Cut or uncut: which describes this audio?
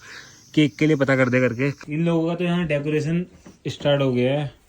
cut